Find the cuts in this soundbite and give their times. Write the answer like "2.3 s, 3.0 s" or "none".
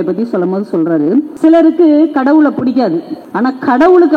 1.3 s, 3.2 s